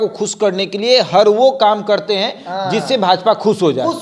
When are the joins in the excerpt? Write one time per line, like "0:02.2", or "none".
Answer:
none